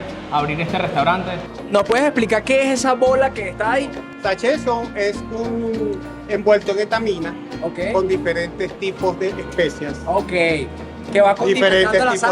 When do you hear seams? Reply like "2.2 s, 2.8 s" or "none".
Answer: 1.6 s, 4.0 s